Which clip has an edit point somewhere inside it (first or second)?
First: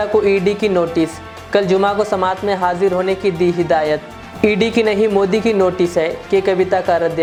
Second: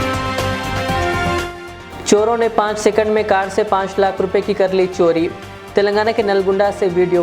second